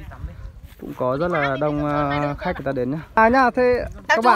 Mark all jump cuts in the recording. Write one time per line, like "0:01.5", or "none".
0:03.2